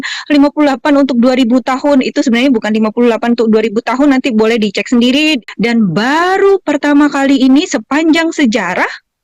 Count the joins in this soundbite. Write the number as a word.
one